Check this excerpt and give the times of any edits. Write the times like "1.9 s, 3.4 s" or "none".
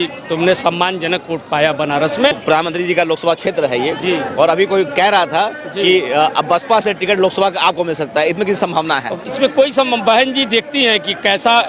2.4 s